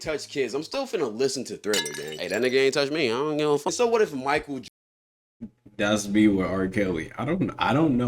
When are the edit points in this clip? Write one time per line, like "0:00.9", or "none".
none

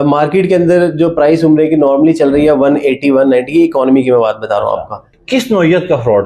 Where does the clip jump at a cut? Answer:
0:05.1

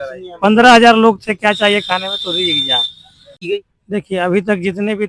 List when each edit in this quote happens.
0:03.5

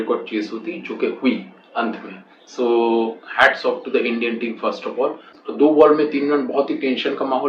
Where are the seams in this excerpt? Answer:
0:05.4

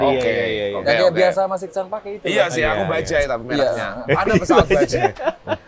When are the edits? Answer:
none

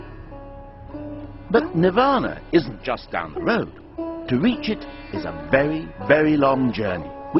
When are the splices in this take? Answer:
0:05.2

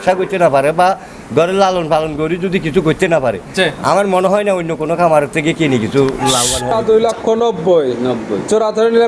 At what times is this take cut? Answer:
0:06.7

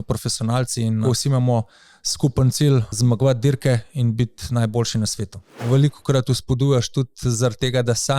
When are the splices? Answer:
0:01.0
0:02.9
0:05.6

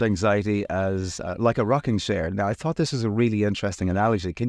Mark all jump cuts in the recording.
none

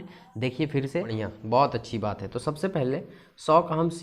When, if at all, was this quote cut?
0:01.1

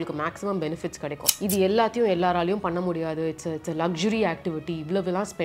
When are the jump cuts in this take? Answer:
0:01.3

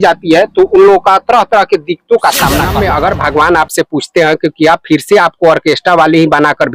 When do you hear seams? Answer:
0:02.7

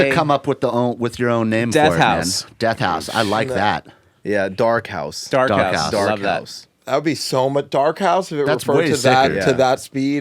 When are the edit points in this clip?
none

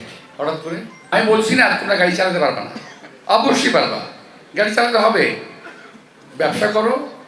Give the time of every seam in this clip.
0:01.1

